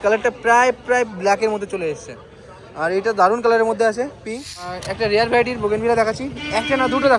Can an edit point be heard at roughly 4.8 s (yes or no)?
yes